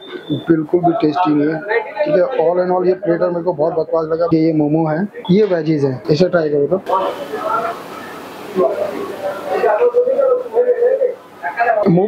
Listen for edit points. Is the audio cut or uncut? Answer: uncut